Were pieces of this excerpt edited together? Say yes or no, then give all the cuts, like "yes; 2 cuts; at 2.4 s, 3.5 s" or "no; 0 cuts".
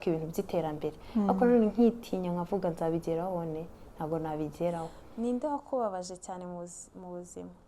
yes; 1 cut; at 5.0 s